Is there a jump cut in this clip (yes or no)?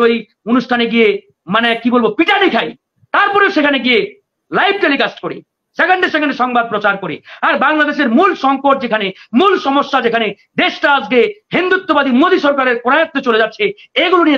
no